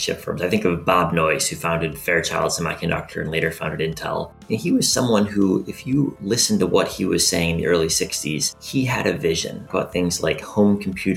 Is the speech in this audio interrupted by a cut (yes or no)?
yes